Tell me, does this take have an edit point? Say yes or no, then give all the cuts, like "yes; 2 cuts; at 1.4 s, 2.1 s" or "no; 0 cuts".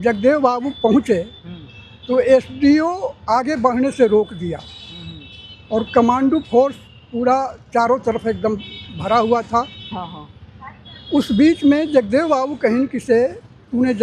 no; 0 cuts